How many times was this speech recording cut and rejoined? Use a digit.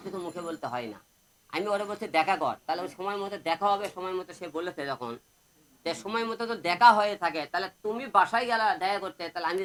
0